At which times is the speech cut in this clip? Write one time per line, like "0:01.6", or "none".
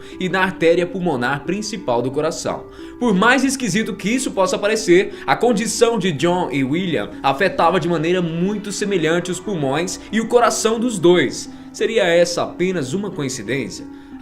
0:06.3